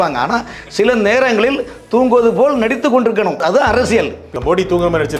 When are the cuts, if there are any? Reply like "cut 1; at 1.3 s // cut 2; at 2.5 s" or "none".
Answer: cut 1; at 3.4 s // cut 2; at 4.3 s